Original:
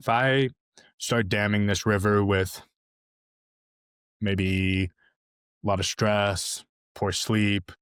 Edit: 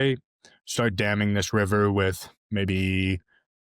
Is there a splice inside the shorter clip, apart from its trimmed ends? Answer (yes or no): yes